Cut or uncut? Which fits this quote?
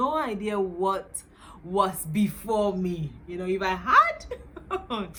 uncut